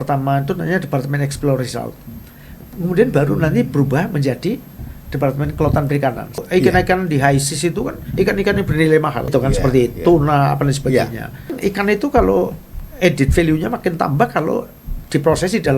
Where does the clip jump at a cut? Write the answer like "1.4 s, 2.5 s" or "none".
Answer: 6.3 s, 9.2 s, 11.5 s